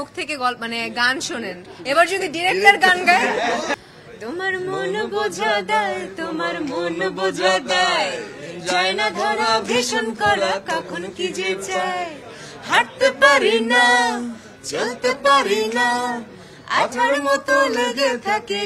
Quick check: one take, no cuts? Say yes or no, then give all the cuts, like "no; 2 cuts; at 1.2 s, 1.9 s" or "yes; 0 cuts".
no; 1 cut; at 3.8 s